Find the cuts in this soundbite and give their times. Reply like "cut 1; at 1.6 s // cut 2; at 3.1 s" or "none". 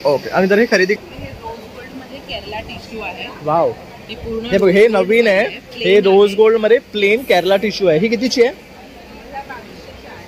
cut 1; at 1.0 s